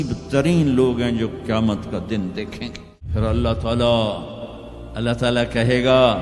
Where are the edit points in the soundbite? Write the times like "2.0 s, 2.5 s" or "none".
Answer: 2.9 s